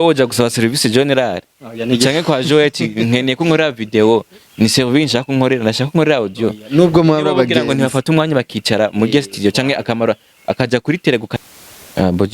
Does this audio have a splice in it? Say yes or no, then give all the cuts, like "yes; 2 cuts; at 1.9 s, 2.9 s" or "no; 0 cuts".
yes; 1 cut; at 11.3 s